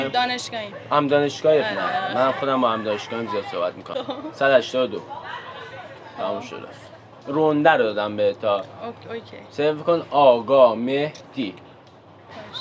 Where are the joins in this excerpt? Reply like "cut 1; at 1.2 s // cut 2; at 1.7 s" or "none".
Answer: cut 1; at 3.9 s